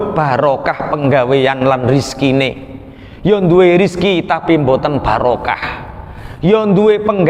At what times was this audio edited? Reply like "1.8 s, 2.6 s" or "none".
none